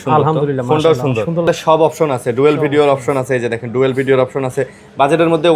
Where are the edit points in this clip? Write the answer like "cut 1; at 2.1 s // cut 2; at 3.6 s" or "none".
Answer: cut 1; at 1.5 s